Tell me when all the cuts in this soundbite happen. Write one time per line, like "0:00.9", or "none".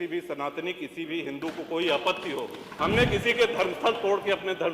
0:02.6